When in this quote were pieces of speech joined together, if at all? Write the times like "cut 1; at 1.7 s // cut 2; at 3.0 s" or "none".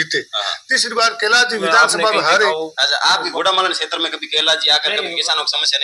cut 1; at 2.5 s

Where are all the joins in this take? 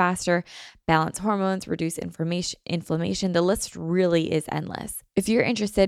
cut 1; at 5.0 s

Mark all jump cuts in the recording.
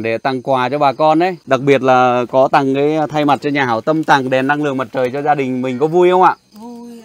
cut 1; at 1.4 s

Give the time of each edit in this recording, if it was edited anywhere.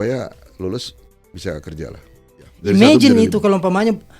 cut 1; at 2.4 s

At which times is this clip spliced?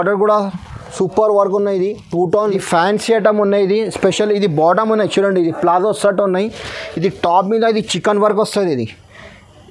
cut 1; at 2.5 s

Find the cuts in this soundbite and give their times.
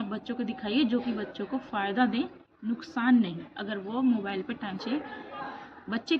cut 1; at 4.8 s

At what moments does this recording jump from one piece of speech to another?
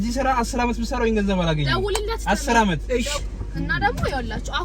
cut 1; at 3.1 s

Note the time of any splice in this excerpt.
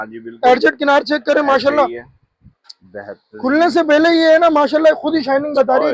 none

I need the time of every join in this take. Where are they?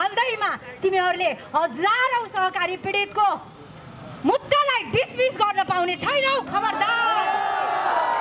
none

